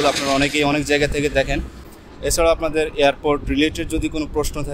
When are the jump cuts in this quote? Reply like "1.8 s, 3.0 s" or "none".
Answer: 1.8 s